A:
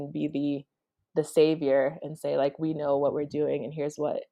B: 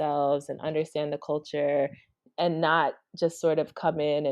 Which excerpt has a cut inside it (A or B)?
B